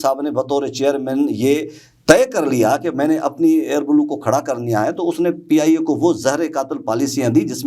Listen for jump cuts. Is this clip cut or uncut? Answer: uncut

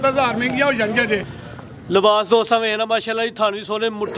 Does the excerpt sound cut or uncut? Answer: cut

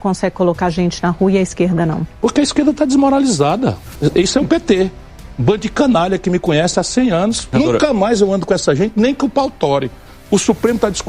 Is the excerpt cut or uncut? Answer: cut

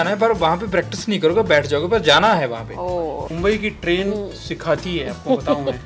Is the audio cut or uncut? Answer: cut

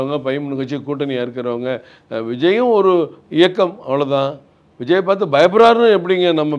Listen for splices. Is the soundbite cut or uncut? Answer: uncut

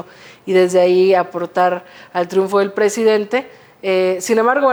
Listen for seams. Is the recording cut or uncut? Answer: uncut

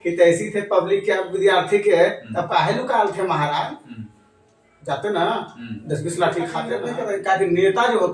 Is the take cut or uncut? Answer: cut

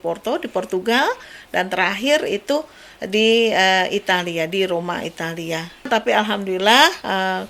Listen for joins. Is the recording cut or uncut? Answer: cut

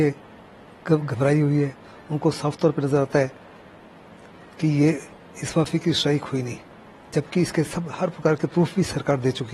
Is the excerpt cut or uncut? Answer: uncut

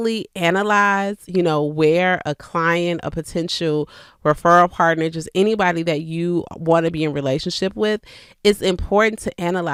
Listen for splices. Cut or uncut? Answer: uncut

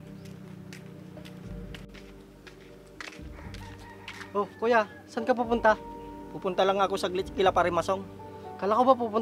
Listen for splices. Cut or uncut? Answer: uncut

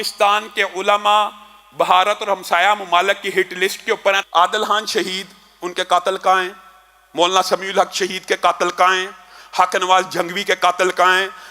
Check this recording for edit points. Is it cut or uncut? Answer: cut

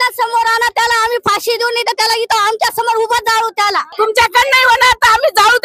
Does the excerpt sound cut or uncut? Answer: cut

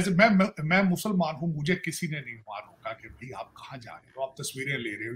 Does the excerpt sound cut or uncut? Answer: uncut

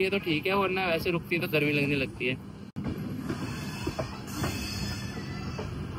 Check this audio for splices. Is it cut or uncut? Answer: uncut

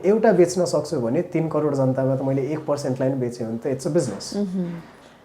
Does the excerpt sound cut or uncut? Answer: uncut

